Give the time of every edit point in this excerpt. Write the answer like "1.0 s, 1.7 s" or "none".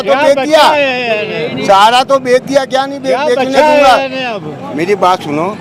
none

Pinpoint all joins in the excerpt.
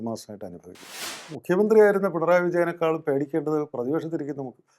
1.0 s

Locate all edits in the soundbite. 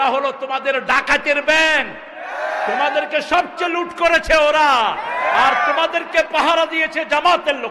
none

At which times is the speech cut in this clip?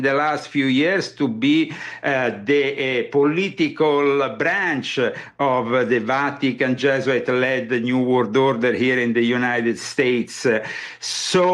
none

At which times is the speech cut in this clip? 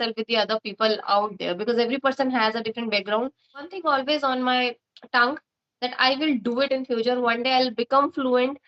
3.7 s

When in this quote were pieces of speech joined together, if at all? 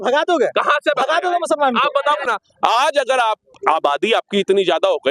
2.2 s

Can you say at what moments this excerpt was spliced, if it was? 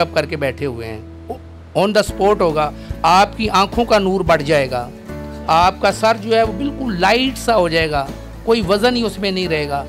none

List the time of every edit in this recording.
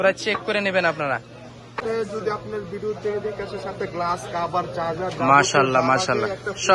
1.8 s

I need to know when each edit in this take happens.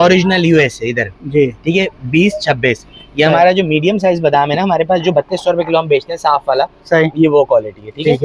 none

